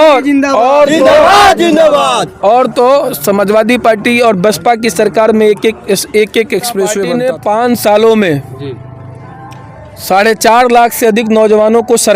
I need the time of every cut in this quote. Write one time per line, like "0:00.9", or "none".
0:07.1